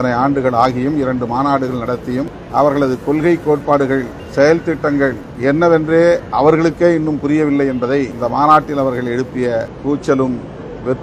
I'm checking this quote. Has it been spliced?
yes; 6 cuts; at 2.4 s, 4.2 s, 5.3 s, 6.3 s, 8.1 s, 9.7 s

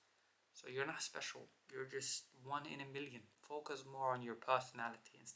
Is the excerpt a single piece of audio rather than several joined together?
no; 1 cut; at 3.3 s

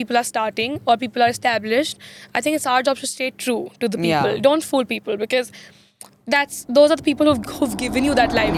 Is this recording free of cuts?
yes; 0 cuts

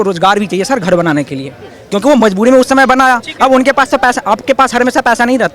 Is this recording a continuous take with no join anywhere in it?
yes; 0 cuts

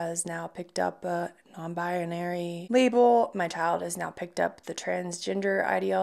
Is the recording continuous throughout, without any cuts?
no; 1 cut; at 2.6 s

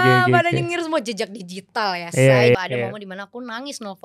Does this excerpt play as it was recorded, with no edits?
no; 1 cut; at 2.5 s

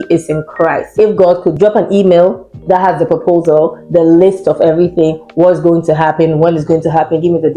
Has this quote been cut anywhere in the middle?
yes; 1 cut; at 0.9 s

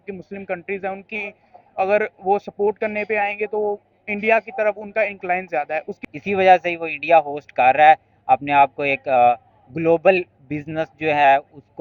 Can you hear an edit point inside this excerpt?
yes; 1 cut; at 6.0 s

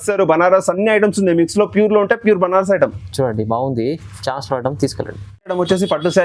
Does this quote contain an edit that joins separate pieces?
no; 0 cuts

